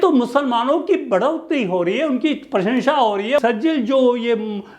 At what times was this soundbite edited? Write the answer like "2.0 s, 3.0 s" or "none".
3.4 s